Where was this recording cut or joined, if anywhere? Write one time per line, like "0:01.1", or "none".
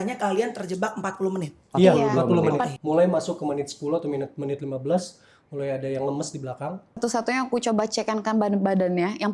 0:02.7
0:07.0